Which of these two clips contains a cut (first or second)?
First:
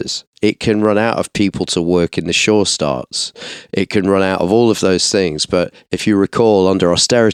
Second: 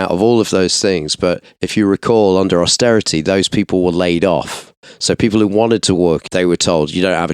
second